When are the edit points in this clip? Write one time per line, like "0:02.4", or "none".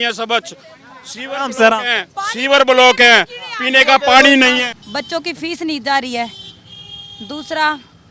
0:04.6